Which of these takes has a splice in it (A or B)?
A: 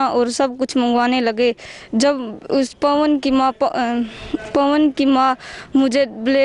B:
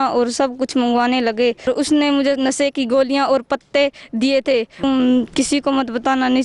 B